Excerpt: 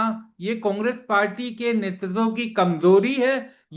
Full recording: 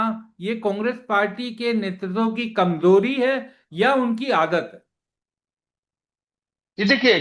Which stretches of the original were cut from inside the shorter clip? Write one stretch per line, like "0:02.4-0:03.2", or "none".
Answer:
none